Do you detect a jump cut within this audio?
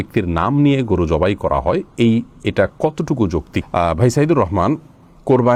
no; 0 cuts

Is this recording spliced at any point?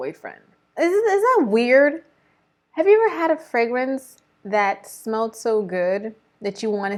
no; 0 cuts

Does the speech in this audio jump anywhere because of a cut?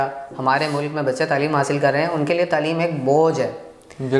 no; 0 cuts

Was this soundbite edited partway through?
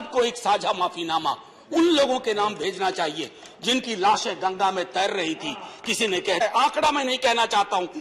yes; 1 cut; at 6.4 s

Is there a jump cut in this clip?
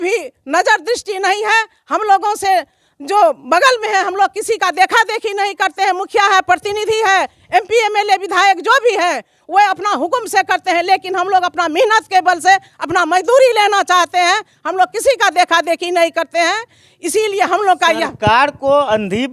no; 0 cuts

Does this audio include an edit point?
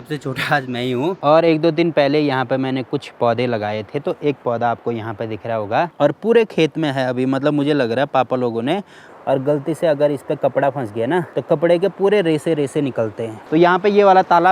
yes; 5 cuts; at 1.2 s, 5.9 s, 9.0 s, 11.3 s, 13.3 s

